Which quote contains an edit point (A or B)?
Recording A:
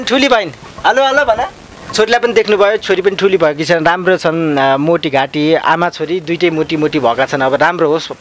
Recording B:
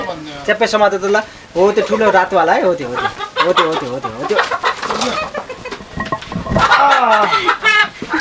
A